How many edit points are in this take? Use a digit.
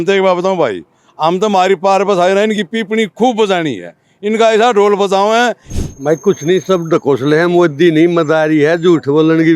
1